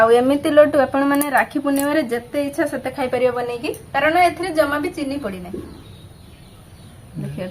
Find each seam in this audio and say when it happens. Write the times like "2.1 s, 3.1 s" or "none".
5.8 s